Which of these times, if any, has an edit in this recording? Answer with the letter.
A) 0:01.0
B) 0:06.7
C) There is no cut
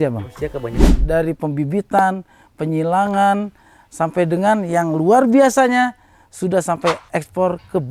A